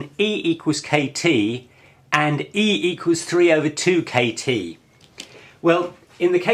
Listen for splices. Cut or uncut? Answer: uncut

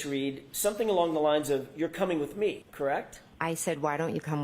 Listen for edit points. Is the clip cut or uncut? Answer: cut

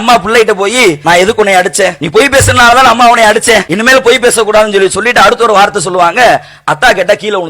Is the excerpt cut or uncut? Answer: cut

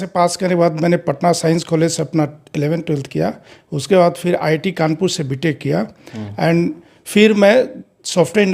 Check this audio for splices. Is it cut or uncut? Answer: uncut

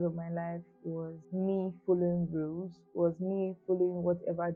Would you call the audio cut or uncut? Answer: uncut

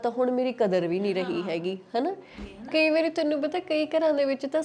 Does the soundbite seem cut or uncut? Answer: cut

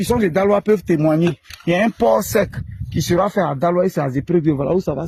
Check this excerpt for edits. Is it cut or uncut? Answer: uncut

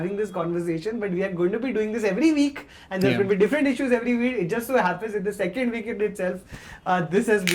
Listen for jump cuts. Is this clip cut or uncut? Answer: uncut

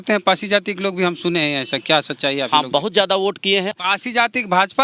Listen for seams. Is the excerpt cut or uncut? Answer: cut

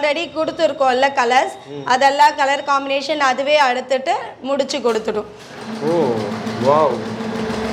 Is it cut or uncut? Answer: uncut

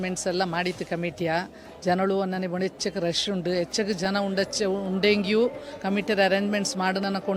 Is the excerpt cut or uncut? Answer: uncut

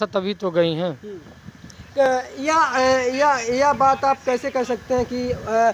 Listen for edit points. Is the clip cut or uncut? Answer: uncut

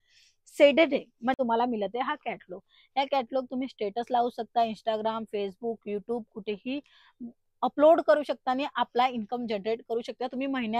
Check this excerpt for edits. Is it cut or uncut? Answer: cut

